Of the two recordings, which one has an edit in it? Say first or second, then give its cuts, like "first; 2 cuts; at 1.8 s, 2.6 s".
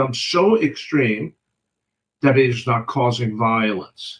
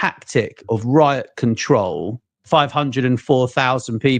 second; 1 cut; at 2.4 s